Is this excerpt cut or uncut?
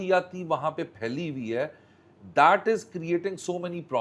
uncut